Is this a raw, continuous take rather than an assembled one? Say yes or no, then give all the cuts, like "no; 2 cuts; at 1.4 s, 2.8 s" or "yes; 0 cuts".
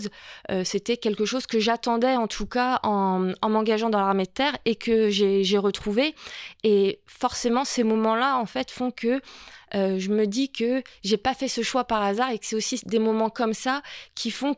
yes; 0 cuts